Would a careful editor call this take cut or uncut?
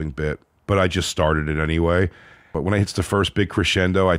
cut